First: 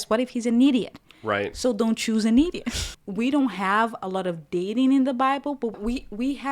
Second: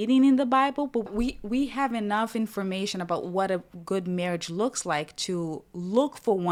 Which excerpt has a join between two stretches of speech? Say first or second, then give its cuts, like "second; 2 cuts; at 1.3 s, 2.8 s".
first; 1 cut; at 2.9 s